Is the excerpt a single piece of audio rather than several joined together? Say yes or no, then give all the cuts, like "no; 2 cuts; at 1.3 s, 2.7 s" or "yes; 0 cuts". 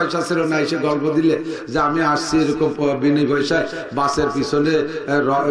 yes; 0 cuts